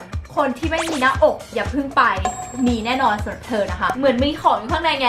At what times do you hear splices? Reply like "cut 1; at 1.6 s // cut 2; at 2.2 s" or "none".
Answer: cut 1; at 3.9 s